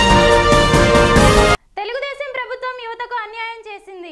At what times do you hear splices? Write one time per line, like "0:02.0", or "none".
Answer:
0:01.4